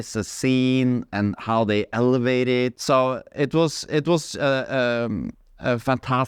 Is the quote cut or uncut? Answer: cut